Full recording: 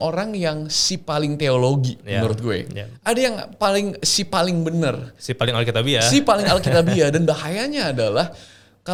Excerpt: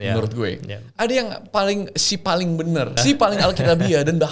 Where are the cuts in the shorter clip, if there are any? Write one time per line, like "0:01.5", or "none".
0:03.0